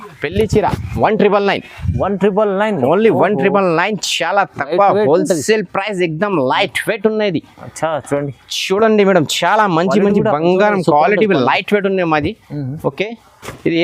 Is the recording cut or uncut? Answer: uncut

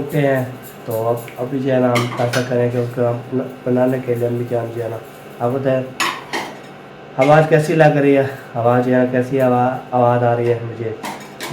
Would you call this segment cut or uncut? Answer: uncut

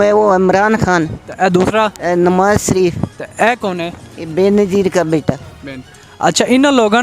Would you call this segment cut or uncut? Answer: cut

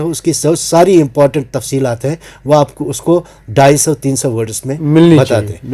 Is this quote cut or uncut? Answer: uncut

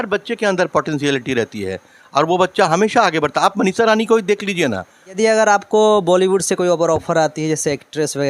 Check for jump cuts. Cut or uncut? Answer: cut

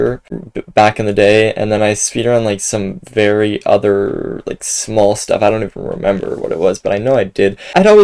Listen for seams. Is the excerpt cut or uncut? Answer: uncut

